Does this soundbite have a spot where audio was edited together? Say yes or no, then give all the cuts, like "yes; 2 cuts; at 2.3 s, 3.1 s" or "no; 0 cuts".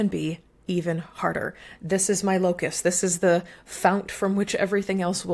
no; 0 cuts